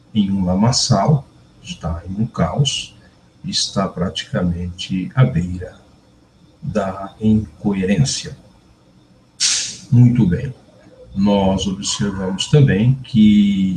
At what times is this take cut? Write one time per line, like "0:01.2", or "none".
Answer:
0:10.6